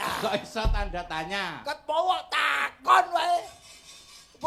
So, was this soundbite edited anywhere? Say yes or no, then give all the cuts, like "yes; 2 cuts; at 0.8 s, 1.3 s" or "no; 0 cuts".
no; 0 cuts